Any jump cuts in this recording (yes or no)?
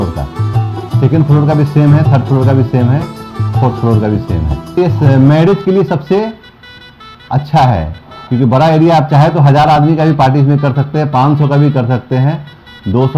no